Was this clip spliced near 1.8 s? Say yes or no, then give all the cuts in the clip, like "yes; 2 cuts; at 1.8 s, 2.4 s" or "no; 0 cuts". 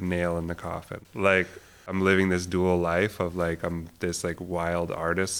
yes; 2 cuts; at 1.0 s, 1.8 s